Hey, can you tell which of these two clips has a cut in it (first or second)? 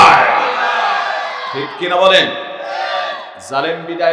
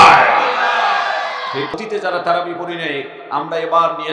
second